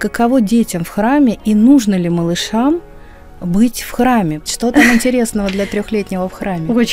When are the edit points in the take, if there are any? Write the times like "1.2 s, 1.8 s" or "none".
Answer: 4.5 s